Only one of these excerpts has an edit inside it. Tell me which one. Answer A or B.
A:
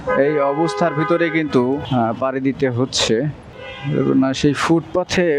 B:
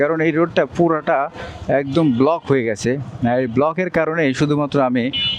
A